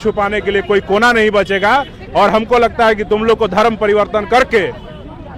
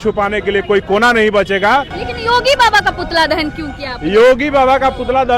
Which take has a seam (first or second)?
second